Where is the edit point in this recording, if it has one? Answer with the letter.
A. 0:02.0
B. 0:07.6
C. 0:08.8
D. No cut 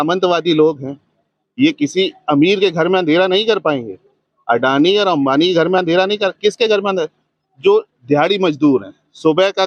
D